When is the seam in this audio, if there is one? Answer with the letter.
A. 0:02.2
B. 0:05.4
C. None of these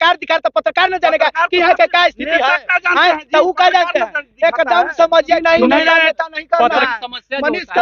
B